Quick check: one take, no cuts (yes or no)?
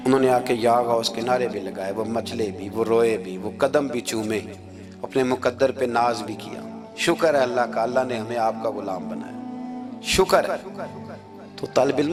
yes